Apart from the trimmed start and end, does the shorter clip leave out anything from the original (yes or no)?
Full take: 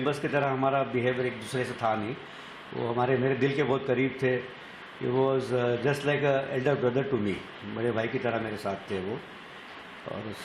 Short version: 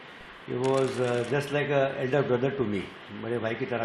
no